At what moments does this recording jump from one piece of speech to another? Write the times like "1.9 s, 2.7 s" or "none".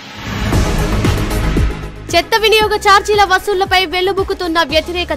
none